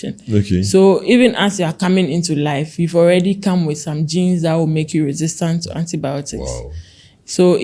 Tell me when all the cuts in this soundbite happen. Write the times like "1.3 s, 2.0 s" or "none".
none